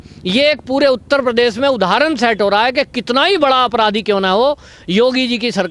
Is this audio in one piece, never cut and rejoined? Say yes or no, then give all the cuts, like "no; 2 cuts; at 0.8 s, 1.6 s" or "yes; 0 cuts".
yes; 0 cuts